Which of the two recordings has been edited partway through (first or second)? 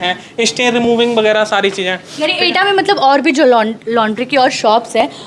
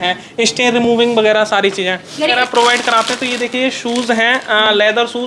second